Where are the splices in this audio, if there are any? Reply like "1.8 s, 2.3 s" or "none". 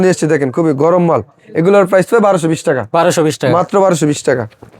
none